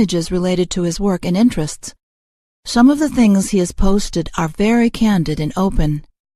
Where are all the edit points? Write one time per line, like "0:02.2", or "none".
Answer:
0:03.0